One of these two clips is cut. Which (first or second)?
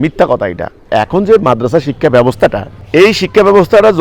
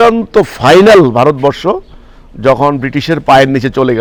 first